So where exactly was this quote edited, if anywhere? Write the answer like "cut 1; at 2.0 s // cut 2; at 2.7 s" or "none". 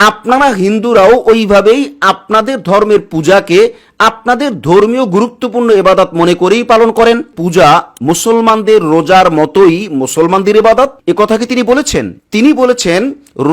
cut 1; at 7.3 s // cut 2; at 12.2 s